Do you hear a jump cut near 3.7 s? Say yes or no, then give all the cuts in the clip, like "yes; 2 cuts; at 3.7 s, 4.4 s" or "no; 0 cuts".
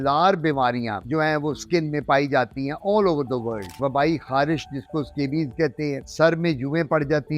yes; 1 cut; at 3.7 s